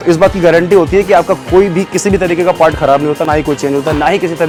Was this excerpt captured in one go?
yes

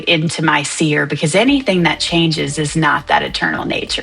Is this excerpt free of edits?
yes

